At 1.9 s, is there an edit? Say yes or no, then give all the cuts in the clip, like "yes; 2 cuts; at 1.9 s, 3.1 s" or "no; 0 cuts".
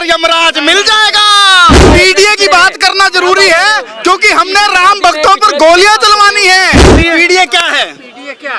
yes; 2 cuts; at 1.9 s, 7.0 s